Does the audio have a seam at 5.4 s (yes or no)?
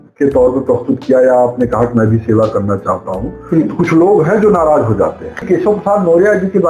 yes